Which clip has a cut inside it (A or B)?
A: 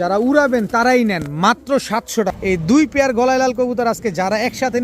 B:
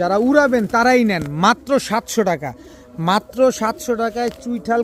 A